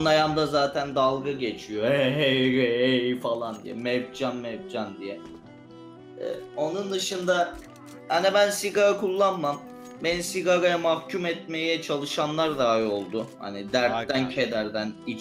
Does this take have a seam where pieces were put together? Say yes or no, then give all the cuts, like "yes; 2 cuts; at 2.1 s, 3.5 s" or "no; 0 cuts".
no; 0 cuts